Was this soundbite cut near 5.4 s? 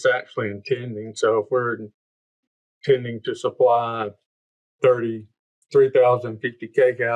no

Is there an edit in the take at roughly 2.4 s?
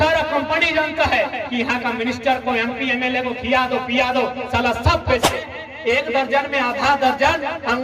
no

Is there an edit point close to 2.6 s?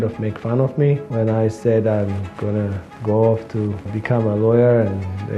no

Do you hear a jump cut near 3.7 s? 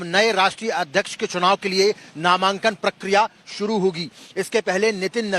no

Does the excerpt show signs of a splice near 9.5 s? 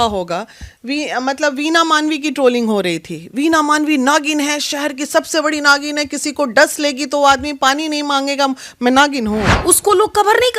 yes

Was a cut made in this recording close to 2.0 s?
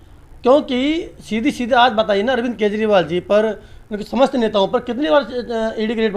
no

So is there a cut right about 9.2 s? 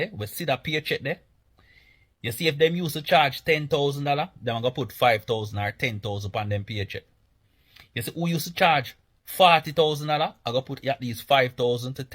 no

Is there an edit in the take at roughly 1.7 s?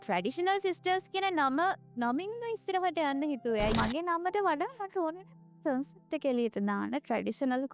no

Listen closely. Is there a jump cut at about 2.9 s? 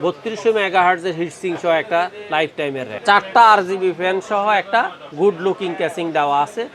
yes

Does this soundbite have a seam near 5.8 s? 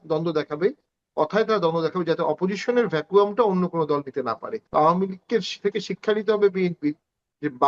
no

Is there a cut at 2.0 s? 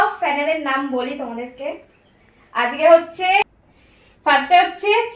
no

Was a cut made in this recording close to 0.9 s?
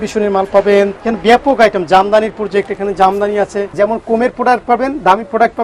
yes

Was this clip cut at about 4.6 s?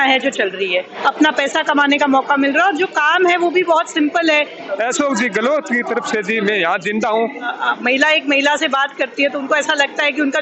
yes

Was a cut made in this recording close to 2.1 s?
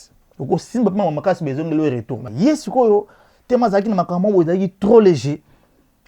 yes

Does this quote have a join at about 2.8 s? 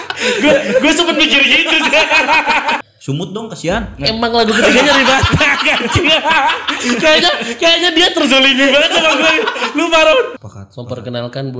yes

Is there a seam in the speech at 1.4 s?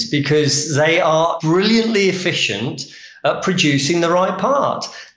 yes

